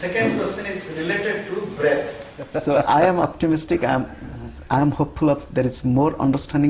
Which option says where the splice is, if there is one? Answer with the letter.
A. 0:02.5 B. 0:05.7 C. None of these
A